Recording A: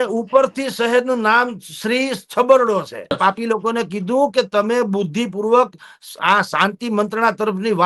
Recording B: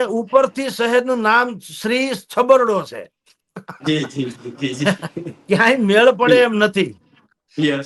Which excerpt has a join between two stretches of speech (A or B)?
A